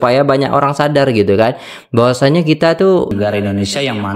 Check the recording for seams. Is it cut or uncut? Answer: cut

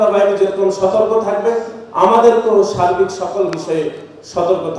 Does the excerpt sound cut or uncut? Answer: uncut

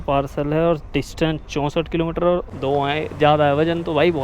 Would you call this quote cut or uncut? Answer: cut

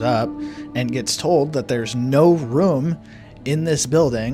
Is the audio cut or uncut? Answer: uncut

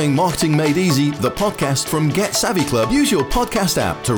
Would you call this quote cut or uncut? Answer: uncut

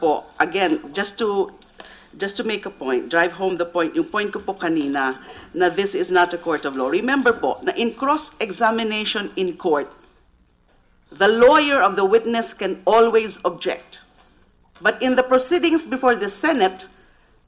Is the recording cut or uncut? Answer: uncut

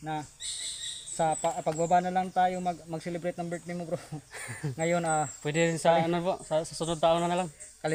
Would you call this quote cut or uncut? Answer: uncut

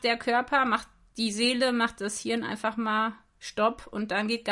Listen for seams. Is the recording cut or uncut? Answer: uncut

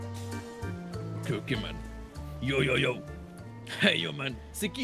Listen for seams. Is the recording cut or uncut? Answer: uncut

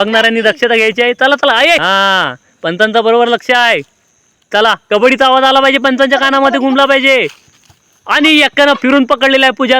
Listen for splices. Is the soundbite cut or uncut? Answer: cut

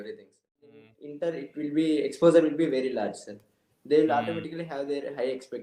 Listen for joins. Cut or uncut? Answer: cut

